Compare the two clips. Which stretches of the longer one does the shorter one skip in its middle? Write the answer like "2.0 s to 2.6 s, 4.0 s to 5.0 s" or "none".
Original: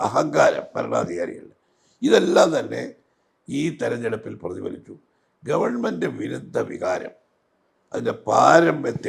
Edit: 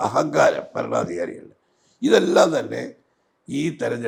none